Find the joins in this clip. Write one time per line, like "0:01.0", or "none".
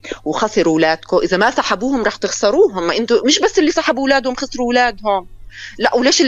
none